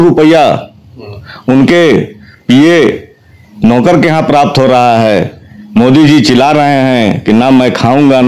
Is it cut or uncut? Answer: uncut